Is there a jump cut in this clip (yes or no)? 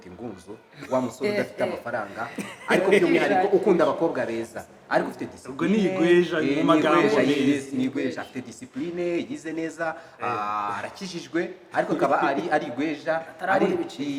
no